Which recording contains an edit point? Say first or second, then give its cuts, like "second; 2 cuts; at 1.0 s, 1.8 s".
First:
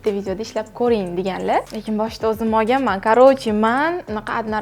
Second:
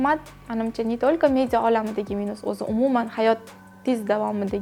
first; 1 cut; at 1.7 s